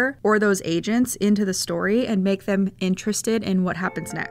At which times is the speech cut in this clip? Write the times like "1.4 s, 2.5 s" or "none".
none